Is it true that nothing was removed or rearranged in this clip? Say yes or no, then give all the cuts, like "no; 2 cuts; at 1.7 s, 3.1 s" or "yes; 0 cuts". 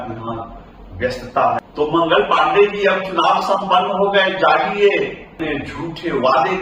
no; 2 cuts; at 1.3 s, 5.4 s